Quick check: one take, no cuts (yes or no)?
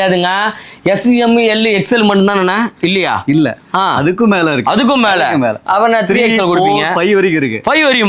yes